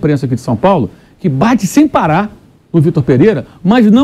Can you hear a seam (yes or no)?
no